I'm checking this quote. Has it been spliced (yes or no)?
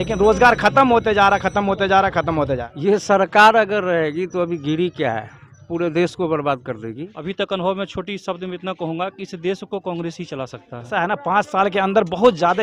yes